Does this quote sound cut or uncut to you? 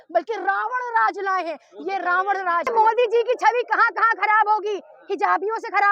cut